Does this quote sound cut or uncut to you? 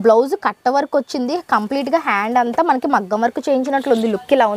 uncut